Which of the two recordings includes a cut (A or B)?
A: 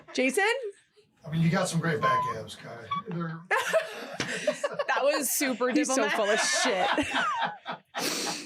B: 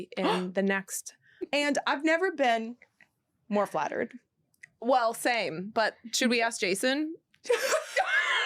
B